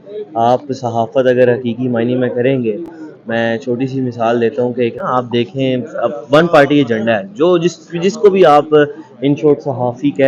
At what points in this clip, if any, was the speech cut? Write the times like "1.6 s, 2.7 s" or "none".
none

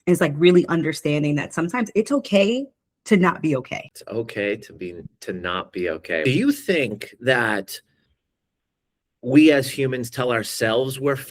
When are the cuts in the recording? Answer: 3.9 s, 6.2 s

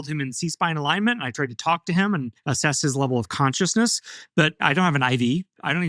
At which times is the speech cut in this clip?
2.4 s, 4.6 s

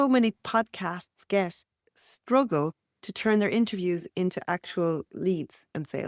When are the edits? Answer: none

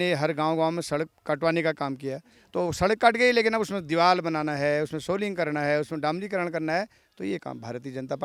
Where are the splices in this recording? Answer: none

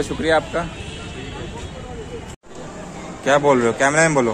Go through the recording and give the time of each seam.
2.5 s

